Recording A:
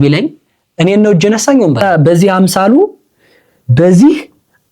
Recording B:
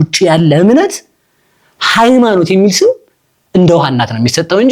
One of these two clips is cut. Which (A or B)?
A